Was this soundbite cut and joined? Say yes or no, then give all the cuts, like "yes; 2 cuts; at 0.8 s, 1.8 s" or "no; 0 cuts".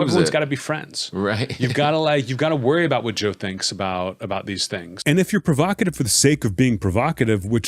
yes; 1 cut; at 4.9 s